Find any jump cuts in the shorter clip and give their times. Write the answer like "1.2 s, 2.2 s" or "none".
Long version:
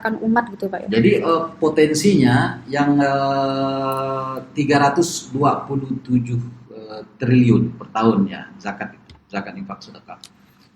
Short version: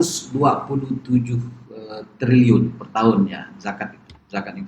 none